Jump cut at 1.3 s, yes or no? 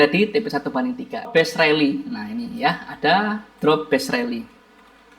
yes